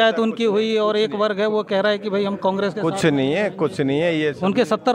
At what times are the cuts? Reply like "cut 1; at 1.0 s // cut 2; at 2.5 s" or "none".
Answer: none